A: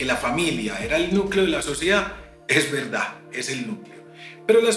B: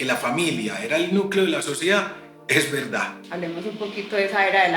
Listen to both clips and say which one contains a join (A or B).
B